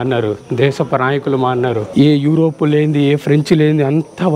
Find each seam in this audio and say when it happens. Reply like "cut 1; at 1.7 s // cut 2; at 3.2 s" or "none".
cut 1; at 1.9 s